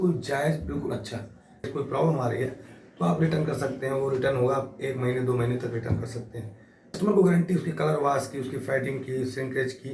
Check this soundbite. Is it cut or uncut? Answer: cut